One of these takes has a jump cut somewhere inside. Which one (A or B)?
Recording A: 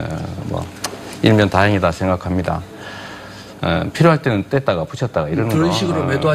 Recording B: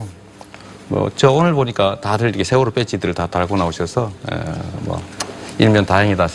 B